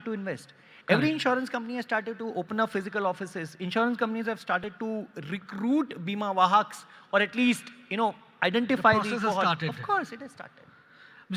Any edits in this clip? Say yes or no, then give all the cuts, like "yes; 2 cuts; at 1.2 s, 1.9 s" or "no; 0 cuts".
no; 0 cuts